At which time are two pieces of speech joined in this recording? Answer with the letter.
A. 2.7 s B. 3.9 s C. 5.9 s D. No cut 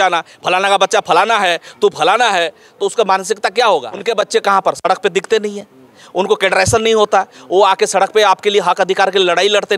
B